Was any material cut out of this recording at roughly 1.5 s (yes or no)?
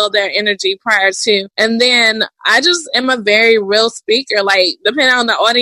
yes